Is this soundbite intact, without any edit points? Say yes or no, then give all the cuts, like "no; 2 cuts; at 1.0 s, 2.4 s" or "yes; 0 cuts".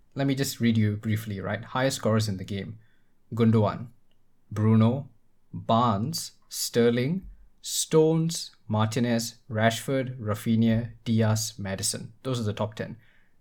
yes; 0 cuts